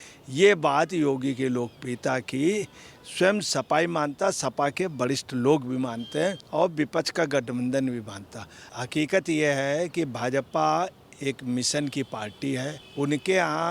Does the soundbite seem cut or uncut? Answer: cut